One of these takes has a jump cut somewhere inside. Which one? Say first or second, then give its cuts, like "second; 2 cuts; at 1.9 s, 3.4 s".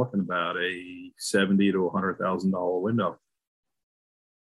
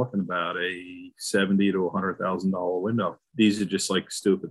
second; 1 cut; at 3.2 s